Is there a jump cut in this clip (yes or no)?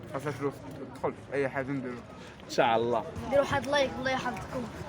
yes